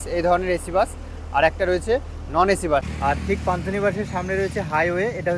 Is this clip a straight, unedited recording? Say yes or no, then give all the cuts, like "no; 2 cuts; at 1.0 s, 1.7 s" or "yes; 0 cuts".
no; 1 cut; at 2.9 s